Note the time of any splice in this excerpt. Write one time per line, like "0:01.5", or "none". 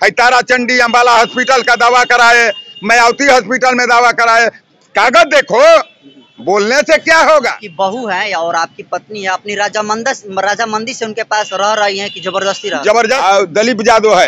0:07.6
0:13.2